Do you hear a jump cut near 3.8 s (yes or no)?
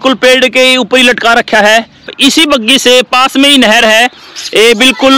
no